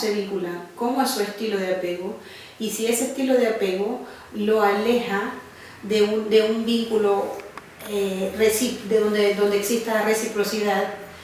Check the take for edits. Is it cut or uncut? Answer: uncut